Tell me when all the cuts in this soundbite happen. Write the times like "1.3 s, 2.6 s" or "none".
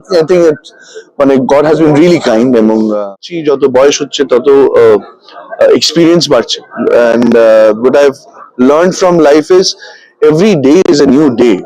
3.1 s